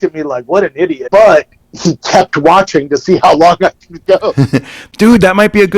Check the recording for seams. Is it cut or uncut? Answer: cut